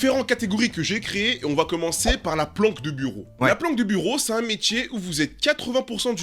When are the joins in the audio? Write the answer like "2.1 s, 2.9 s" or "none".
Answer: none

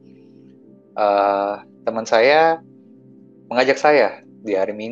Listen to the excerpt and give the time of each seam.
none

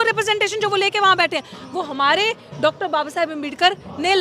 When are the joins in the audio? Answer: none

